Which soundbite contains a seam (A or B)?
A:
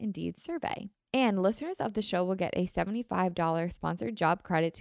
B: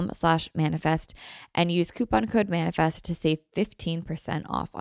A